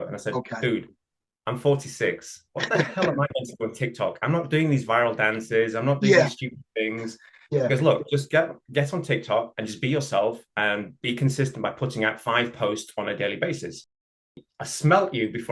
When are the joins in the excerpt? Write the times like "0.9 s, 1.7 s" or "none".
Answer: 14.3 s